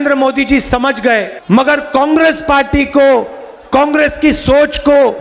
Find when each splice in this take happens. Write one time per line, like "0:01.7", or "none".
0:01.3

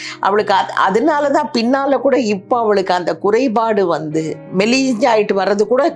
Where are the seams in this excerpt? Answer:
0:04.4

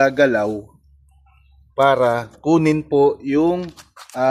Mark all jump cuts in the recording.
none

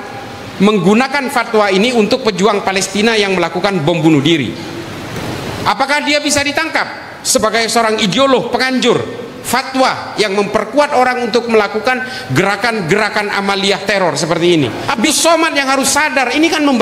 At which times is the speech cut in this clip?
0:15.1

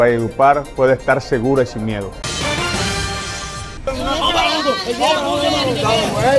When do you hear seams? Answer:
0:02.2
0:03.8

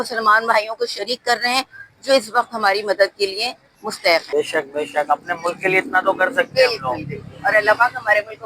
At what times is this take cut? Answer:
0:04.3

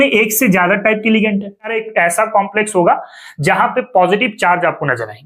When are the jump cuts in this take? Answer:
0:01.8

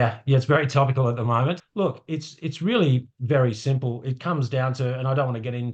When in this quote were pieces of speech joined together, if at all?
0:01.6

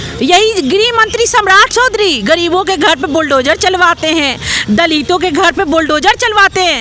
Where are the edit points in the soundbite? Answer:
none

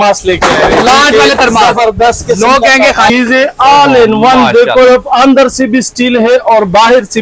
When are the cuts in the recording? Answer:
0:03.1

